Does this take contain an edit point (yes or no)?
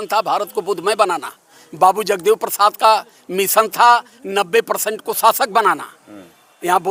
no